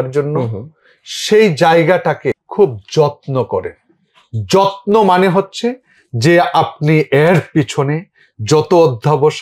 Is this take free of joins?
no; 1 cut; at 2.4 s

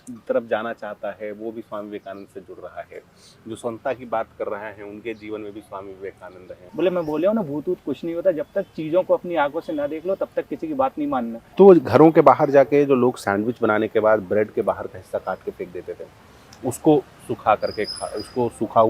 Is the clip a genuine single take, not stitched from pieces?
no; 2 cuts; at 6.6 s, 11.4 s

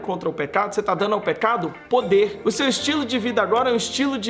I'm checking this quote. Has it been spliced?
yes; 1 cut; at 2.4 s

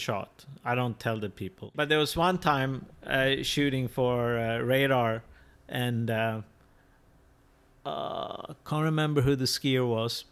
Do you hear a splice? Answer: yes; 1 cut; at 1.7 s

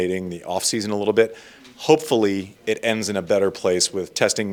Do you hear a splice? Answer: no; 0 cuts

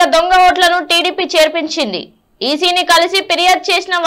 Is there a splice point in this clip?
no; 0 cuts

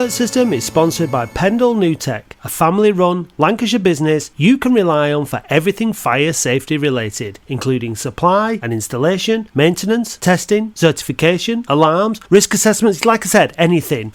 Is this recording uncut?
yes; 0 cuts

